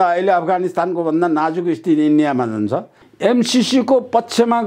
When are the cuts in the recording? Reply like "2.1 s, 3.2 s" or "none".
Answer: 3.0 s

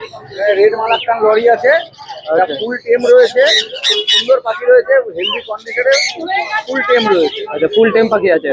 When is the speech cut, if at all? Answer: none

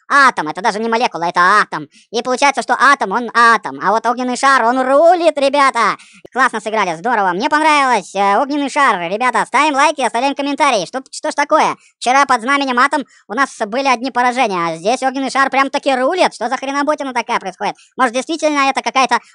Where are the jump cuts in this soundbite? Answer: 6.1 s

